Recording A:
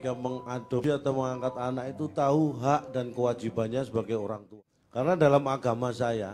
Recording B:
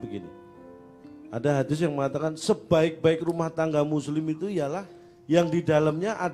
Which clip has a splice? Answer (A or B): A